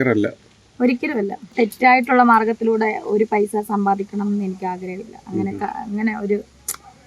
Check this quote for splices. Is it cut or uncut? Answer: cut